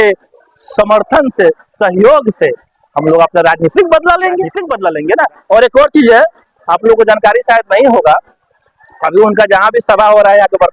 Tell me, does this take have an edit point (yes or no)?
yes